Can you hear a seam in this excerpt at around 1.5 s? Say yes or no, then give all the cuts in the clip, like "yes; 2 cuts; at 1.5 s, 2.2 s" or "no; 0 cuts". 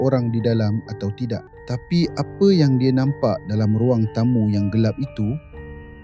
yes; 1 cut; at 1.5 s